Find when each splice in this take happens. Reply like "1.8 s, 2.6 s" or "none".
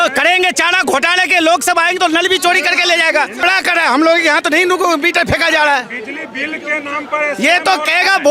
3.4 s